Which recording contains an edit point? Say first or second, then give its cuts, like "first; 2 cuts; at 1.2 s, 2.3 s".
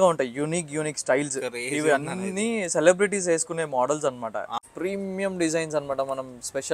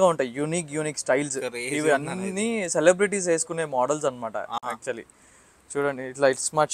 first; 1 cut; at 4.7 s